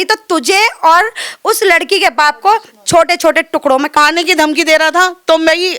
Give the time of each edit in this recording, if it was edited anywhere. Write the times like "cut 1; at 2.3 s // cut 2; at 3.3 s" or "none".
cut 1; at 4.0 s